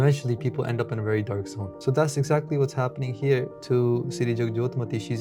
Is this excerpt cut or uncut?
cut